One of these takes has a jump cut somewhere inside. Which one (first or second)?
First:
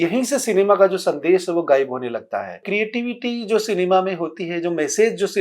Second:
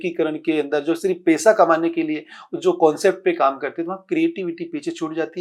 first